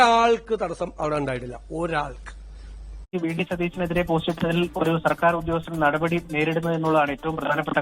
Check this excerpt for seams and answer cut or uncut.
cut